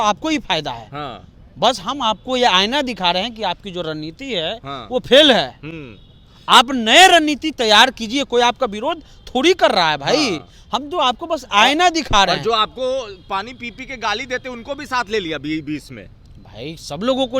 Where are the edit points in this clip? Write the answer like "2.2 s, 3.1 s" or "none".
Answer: none